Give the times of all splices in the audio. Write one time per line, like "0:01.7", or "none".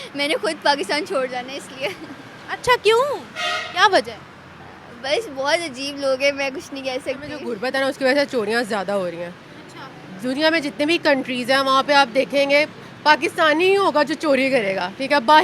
0:07.5